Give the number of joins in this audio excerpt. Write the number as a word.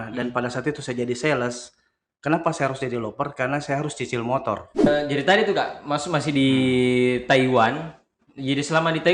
one